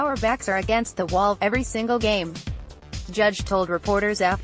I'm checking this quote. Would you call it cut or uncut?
uncut